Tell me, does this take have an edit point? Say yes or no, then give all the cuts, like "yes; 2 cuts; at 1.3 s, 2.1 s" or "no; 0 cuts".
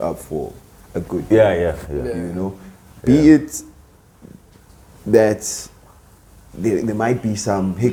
no; 0 cuts